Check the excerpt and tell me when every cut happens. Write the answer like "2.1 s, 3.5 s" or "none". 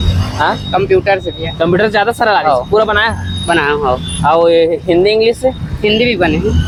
none